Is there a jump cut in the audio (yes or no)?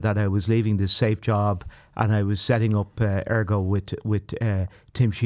no